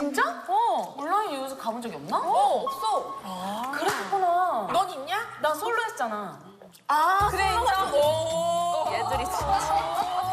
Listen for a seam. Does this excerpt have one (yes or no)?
no